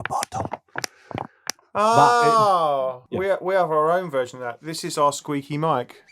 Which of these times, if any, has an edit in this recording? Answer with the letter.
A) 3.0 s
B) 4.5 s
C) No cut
A